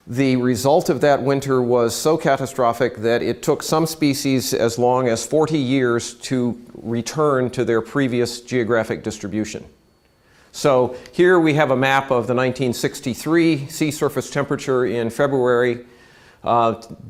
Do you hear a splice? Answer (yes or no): no